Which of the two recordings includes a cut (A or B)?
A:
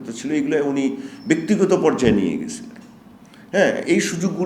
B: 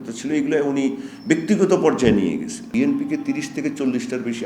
B